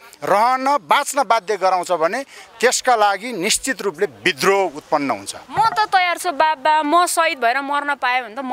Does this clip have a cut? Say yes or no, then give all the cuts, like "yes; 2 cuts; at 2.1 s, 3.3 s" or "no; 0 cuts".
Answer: yes; 1 cut; at 5.4 s